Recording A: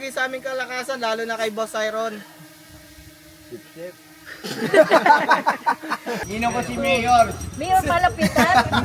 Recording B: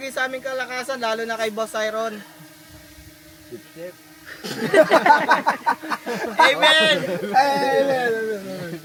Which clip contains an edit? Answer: A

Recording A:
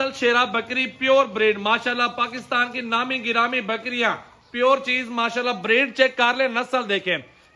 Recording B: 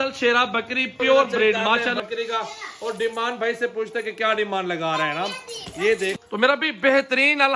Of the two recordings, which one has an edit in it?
B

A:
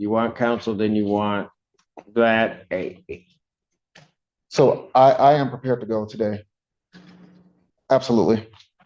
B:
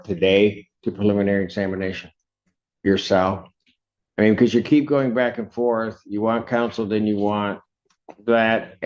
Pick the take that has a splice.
A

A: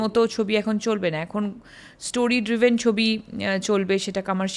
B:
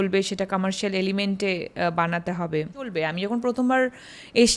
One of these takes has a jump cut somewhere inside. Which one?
B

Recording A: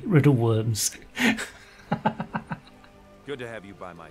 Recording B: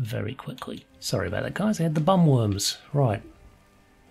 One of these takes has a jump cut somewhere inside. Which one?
B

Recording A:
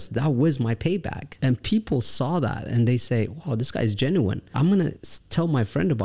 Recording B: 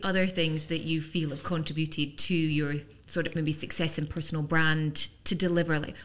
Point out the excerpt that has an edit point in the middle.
A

